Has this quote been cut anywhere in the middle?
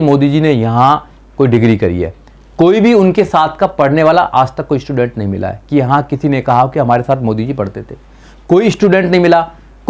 no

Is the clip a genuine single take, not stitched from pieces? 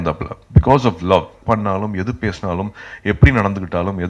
no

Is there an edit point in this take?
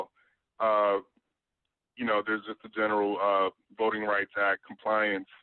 yes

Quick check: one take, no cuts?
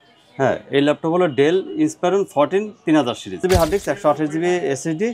no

